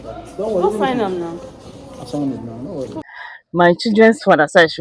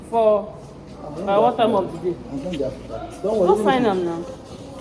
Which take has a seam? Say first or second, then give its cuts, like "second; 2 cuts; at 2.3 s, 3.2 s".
first; 1 cut; at 3.0 s